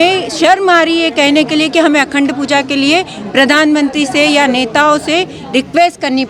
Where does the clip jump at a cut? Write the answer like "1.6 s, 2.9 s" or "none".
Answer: none